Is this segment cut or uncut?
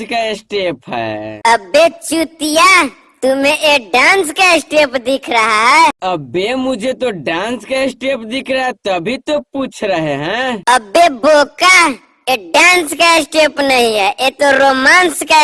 uncut